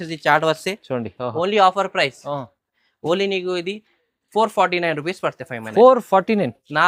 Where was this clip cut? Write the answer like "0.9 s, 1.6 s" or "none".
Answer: none